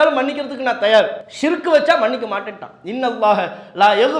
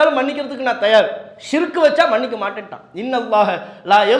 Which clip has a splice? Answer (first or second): first